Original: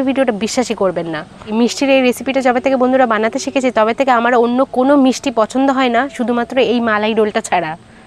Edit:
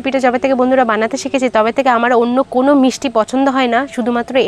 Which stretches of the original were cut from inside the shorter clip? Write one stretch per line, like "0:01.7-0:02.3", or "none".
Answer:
none

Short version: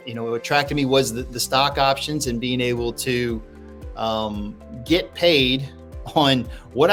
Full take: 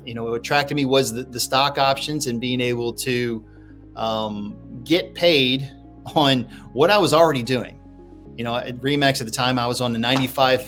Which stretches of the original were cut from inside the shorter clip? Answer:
none

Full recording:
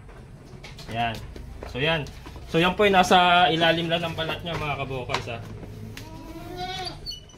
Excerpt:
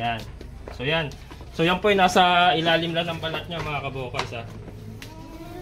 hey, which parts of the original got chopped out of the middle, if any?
none

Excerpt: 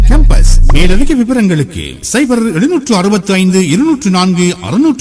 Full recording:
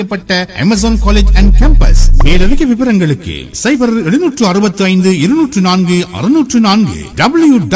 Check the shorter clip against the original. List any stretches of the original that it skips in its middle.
none

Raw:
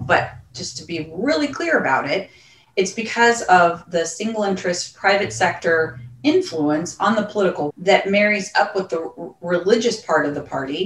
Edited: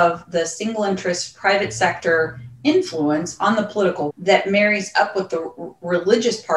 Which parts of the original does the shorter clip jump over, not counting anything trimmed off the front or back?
none

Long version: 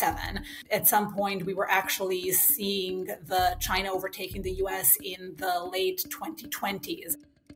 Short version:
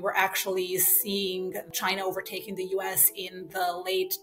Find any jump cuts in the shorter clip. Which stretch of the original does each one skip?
0:03.2-0:03.6

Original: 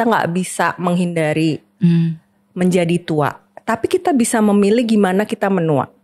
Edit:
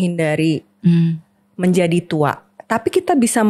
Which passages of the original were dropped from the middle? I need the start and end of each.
none

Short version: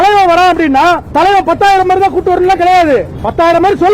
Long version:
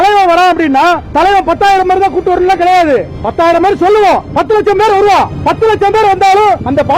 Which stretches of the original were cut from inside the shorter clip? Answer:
none

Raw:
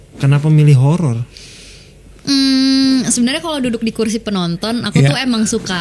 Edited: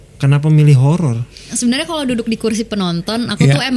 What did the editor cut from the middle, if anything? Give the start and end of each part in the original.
0:01.5-0:03.1

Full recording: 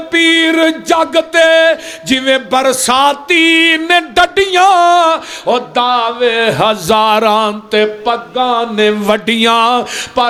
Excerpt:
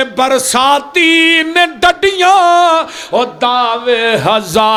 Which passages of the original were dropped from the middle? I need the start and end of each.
none

